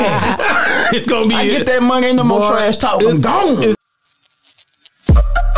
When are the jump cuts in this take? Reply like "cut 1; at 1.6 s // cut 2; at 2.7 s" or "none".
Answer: cut 1; at 3.8 s